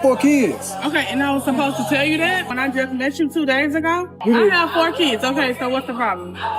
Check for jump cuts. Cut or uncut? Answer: cut